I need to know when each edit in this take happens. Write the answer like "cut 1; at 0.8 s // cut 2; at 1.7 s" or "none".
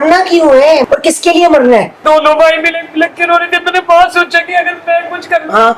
cut 1; at 0.8 s // cut 2; at 2.0 s